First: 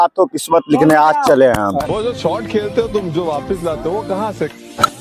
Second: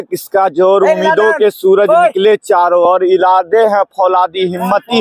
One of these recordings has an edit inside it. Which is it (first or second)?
first